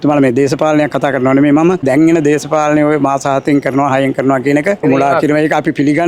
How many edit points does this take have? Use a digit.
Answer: 2